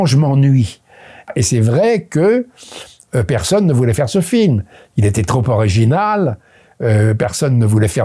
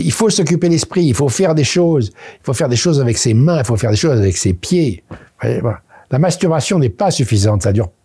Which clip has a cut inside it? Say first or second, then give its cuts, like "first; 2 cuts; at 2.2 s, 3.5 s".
first; 1 cut; at 1.3 s